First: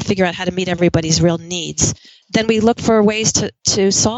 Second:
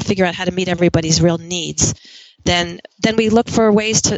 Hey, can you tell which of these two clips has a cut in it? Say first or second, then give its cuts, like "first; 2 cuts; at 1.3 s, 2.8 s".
first; 1 cut; at 2.1 s